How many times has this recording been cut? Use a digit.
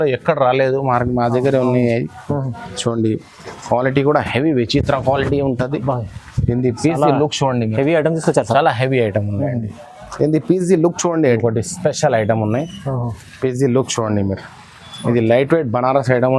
1